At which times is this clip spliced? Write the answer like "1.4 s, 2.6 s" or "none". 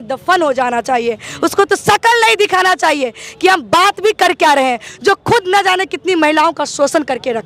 none